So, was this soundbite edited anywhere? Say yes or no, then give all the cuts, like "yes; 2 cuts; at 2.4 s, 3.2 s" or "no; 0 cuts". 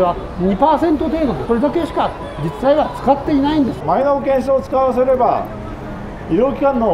yes; 2 cuts; at 1.4 s, 3.8 s